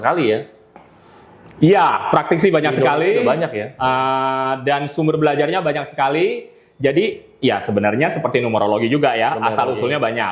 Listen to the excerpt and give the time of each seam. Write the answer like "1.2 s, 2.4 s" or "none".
none